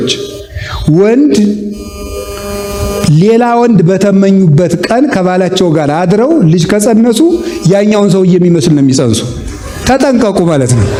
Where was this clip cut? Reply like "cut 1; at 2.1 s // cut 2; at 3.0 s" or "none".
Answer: none